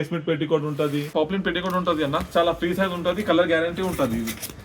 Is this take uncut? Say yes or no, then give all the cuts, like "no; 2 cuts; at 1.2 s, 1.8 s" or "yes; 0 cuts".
no; 1 cut; at 1.1 s